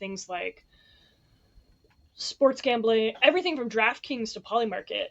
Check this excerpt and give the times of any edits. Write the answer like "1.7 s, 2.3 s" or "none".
3.2 s